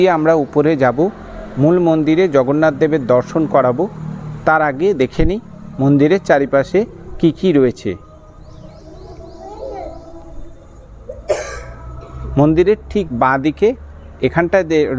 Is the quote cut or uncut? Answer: uncut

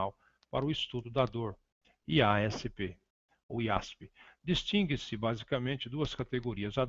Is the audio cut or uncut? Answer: uncut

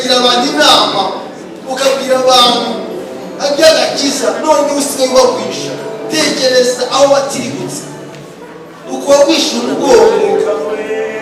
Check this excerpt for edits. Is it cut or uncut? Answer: uncut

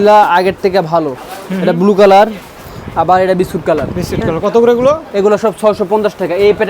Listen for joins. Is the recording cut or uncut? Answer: uncut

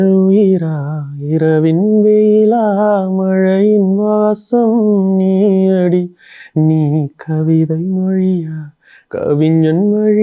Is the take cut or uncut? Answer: uncut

